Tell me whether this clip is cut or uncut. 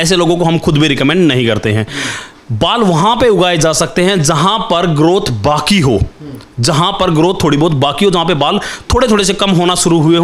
uncut